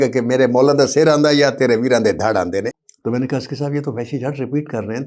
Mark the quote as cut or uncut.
cut